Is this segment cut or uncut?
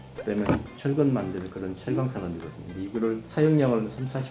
uncut